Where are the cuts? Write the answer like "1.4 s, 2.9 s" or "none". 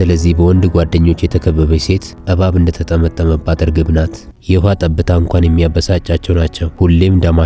4.2 s